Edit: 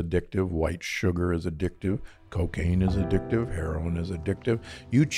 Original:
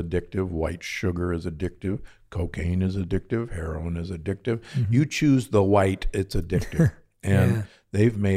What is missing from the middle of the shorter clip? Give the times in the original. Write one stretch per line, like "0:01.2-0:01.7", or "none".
none